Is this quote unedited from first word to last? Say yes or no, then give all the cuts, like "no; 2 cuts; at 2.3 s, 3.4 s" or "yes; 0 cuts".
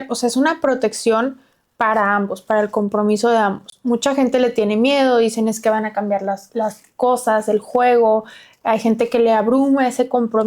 yes; 0 cuts